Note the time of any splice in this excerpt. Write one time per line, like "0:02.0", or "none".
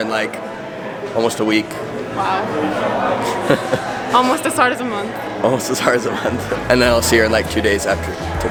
none